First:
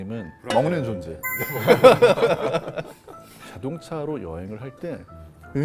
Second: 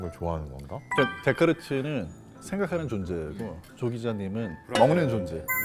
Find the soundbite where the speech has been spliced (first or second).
first